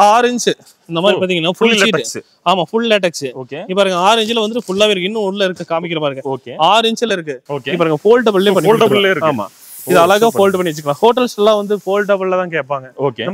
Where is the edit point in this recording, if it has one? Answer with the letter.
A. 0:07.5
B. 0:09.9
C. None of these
A